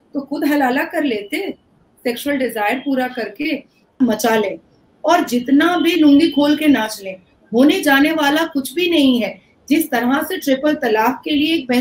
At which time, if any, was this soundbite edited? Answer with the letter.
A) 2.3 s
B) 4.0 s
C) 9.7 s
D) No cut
B